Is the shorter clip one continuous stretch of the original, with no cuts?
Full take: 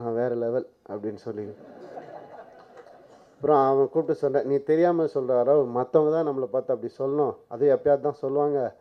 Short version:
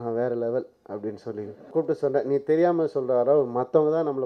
no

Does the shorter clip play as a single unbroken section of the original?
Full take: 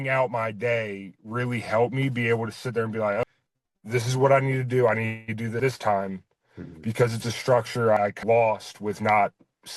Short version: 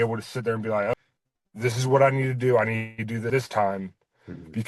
yes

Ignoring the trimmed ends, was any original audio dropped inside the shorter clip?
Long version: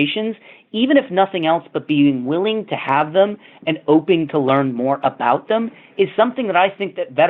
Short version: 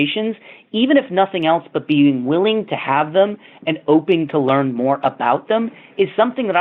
no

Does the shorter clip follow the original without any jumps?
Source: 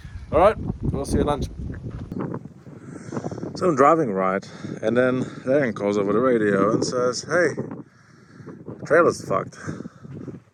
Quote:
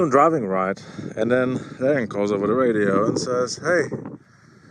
yes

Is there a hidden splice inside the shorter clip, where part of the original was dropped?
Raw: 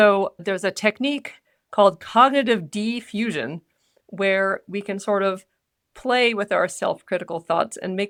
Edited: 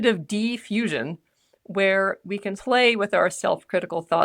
yes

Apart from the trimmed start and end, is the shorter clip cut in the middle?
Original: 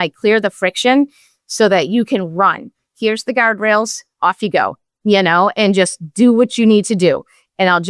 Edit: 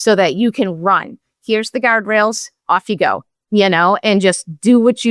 no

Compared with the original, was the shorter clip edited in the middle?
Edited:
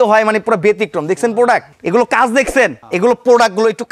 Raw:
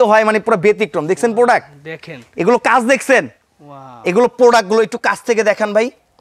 yes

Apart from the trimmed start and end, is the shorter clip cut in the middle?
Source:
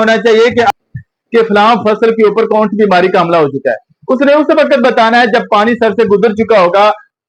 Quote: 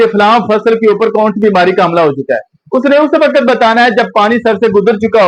no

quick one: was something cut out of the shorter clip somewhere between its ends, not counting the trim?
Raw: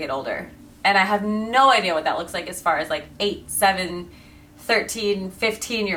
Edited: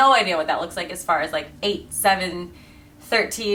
no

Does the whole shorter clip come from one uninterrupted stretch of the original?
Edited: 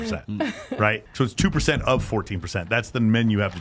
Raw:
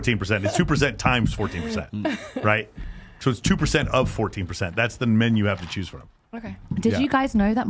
no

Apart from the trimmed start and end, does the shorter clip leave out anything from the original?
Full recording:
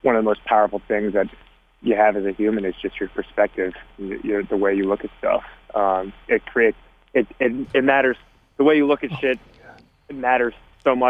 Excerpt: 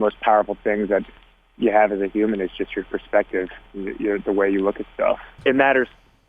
yes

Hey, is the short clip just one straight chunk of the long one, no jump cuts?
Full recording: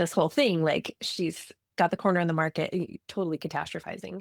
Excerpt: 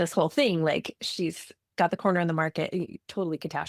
yes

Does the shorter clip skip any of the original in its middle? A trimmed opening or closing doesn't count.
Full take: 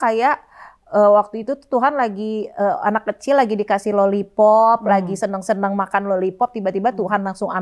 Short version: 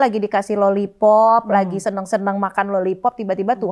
no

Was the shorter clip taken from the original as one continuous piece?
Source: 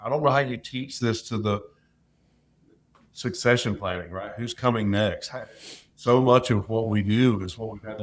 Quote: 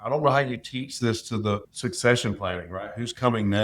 no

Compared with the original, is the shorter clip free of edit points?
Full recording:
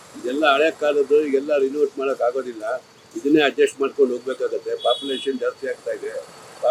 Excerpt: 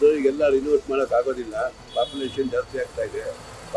no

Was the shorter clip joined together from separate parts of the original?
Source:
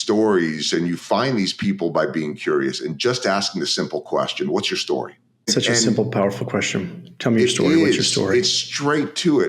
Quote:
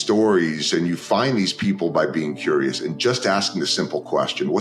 no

